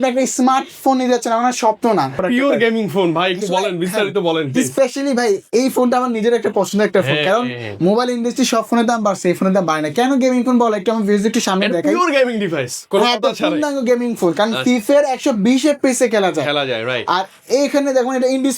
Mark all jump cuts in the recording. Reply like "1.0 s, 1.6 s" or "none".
2.2 s